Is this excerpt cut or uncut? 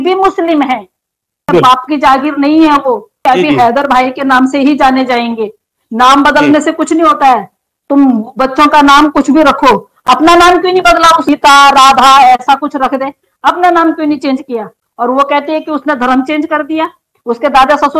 cut